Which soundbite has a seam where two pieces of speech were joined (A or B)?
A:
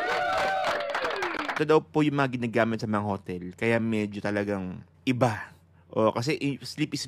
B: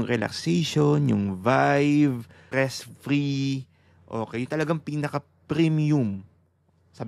A